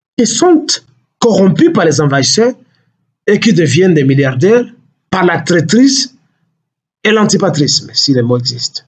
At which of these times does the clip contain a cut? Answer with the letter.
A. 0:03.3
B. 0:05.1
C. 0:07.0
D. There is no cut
D